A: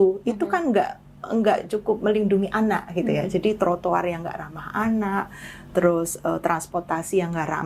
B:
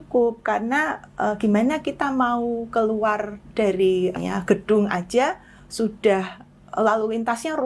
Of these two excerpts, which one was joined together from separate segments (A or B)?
B